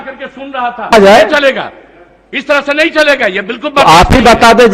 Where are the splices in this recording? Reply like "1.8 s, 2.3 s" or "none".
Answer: 0.9 s